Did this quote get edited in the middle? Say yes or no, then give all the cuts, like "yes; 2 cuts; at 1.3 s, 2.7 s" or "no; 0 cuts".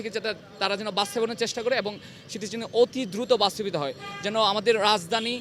no; 0 cuts